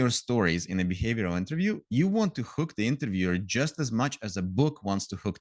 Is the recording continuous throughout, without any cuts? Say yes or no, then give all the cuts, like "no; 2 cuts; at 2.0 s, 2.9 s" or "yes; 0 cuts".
yes; 0 cuts